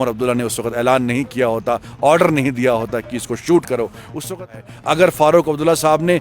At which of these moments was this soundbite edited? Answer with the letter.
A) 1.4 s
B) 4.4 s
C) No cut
B